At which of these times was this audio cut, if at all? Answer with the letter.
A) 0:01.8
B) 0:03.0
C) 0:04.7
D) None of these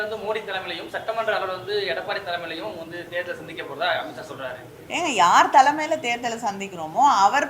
C